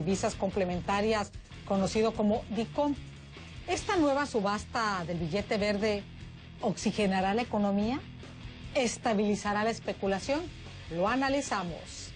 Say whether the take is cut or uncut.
uncut